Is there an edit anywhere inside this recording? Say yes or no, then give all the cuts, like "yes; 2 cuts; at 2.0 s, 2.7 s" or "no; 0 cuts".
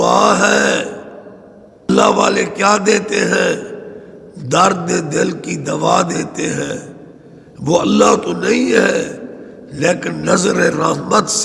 yes; 1 cut; at 1.9 s